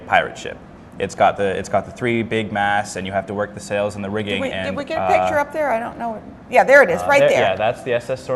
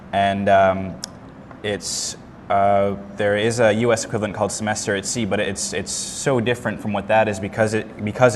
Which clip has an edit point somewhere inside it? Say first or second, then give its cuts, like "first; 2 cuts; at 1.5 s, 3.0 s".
first; 1 cut; at 4.2 s